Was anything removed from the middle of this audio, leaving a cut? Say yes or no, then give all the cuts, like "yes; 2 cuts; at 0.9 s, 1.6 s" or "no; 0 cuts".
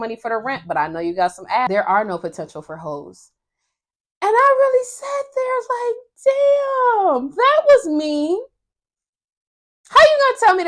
yes; 1 cut; at 1.7 s